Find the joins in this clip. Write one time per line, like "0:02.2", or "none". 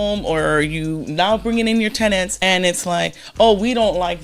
0:02.3